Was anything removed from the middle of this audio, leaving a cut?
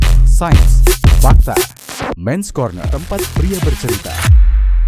no; 0 cuts

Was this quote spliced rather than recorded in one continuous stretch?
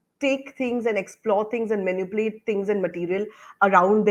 no; 0 cuts

